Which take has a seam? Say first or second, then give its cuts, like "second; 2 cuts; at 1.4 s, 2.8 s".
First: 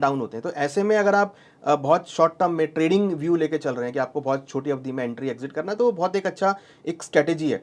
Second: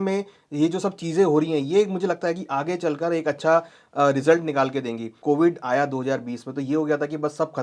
second; 1 cut; at 5.2 s